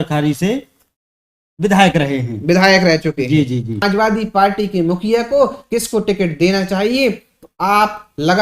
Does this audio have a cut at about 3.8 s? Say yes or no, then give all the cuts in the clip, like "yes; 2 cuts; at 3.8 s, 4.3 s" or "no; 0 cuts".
yes; 1 cut; at 3.8 s